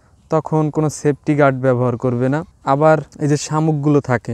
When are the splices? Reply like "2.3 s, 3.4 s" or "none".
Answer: 2.5 s, 3.1 s